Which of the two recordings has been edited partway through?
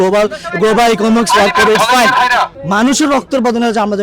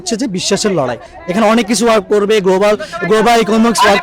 first; 1 cut; at 2.6 s

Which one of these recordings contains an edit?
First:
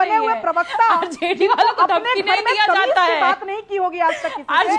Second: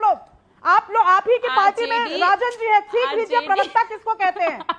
first; 1 cut; at 3.6 s

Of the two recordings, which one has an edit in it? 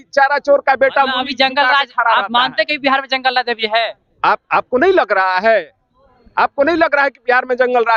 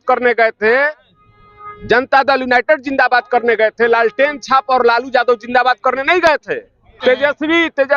second; 1 cut; at 6.9 s

